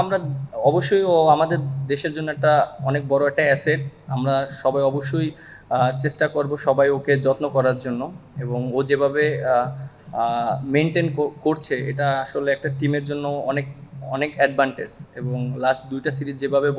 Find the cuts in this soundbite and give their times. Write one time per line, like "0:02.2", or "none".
none